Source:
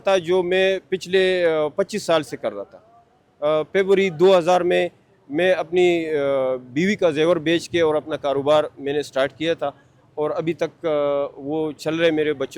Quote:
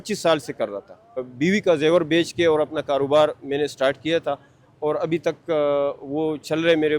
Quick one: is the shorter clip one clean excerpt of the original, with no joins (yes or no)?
no